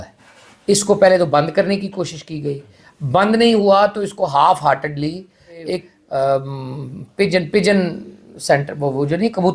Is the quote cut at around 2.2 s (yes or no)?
no